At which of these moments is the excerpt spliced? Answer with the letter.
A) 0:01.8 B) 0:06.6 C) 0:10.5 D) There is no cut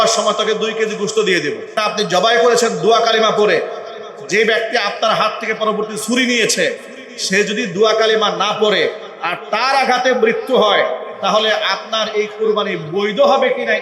A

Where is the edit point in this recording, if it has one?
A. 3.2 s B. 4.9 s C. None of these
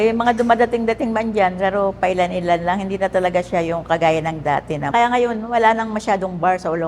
B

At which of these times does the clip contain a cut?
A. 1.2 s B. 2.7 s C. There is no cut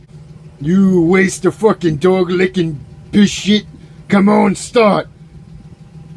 A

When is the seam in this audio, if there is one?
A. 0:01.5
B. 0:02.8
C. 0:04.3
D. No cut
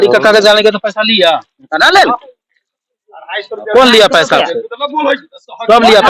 D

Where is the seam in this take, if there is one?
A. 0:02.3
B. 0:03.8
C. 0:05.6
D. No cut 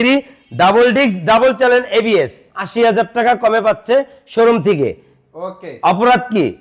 A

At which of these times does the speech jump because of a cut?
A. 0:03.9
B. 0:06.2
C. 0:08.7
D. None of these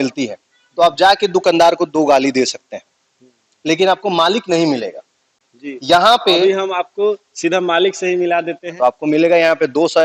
C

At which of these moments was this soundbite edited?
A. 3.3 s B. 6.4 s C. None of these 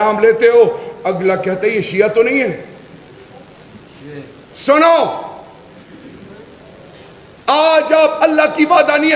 C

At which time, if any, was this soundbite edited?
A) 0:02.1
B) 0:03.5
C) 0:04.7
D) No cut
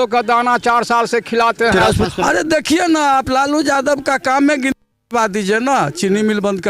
A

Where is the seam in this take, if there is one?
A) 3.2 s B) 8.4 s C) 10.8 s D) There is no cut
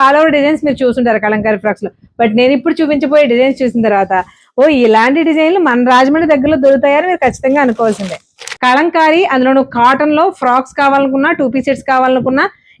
B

